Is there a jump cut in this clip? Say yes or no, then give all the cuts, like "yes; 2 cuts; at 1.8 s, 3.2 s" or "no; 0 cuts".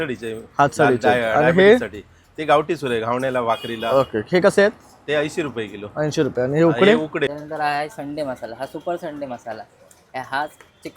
yes; 1 cut; at 7.3 s